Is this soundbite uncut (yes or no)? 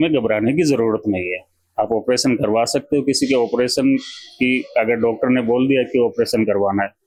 yes